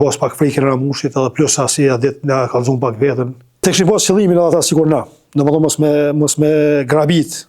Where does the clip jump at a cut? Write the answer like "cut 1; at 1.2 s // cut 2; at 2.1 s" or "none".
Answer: cut 1; at 3.5 s